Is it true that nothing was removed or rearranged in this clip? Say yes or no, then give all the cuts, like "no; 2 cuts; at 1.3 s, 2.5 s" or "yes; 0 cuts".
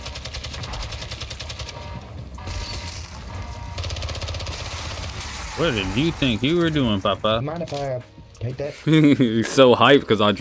no; 1 cut; at 7.4 s